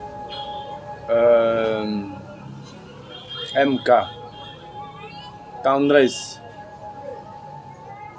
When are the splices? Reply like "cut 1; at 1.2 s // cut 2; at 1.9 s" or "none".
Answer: cut 1; at 1.0 s